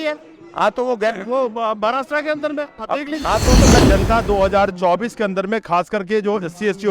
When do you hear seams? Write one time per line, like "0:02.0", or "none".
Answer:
0:03.8

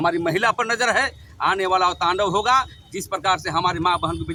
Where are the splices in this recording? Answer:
none

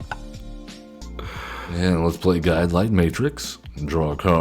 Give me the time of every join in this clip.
0:01.8

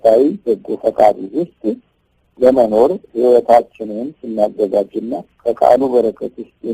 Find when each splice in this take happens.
none

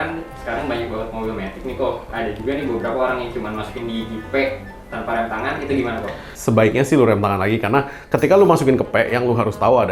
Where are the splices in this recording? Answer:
none

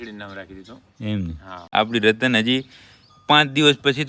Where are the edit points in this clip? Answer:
0:01.6

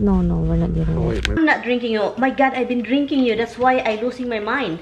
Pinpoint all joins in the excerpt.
0:01.4

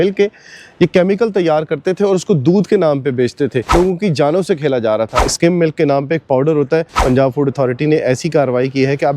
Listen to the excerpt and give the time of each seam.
0:03.7
0:05.2
0:07.0

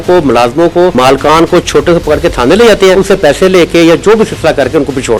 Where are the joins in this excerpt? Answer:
0:00.9
0:02.9

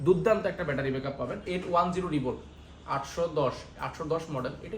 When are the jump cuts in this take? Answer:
0:01.4

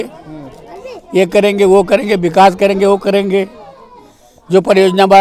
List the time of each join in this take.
none

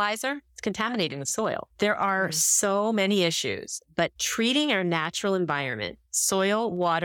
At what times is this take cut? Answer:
0:04.2

